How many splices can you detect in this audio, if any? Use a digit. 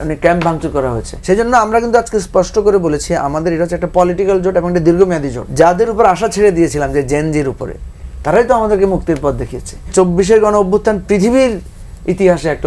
3